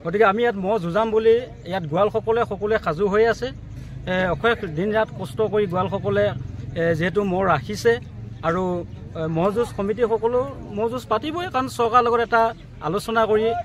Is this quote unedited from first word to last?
yes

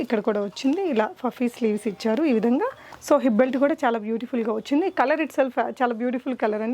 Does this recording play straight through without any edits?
no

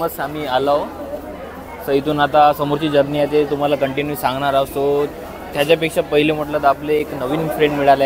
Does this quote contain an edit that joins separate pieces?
no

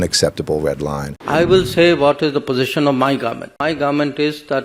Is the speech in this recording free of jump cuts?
no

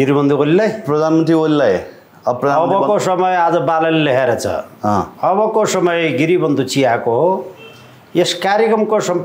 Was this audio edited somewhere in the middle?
no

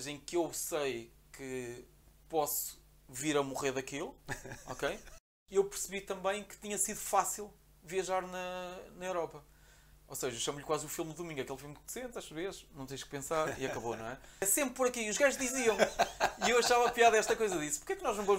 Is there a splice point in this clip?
yes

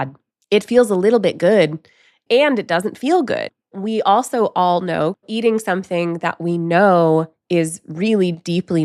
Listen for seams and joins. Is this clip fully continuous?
no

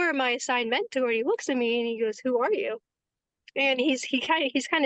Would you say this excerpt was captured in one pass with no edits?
yes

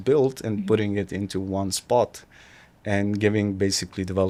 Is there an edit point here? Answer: no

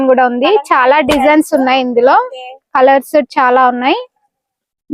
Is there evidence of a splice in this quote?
no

